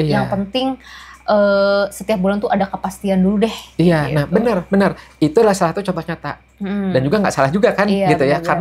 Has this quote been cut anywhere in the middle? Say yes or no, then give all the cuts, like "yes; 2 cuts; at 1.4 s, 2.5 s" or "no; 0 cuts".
no; 0 cuts